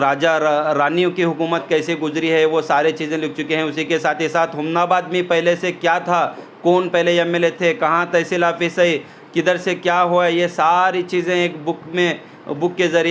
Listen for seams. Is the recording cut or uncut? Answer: uncut